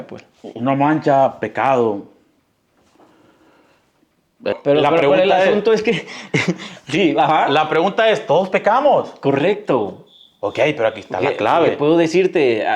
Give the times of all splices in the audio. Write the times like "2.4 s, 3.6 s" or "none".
4.5 s